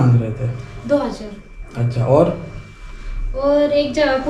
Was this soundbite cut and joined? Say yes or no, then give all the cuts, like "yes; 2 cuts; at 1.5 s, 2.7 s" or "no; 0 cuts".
no; 0 cuts